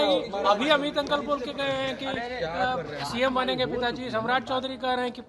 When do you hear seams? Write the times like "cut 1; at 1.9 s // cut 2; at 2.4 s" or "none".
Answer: none